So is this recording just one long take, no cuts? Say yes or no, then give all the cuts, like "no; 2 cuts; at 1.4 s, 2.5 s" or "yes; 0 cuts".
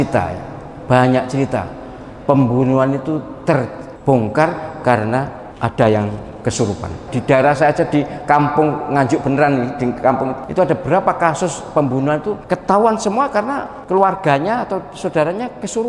no; 6 cuts; at 3.8 s, 5.4 s, 7.1 s, 10.4 s, 12.4 s, 13.7 s